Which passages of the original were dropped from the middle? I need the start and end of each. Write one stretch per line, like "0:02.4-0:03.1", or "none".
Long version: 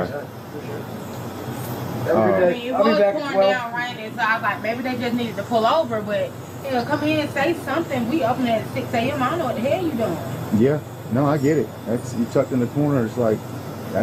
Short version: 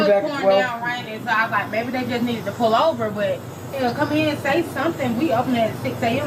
none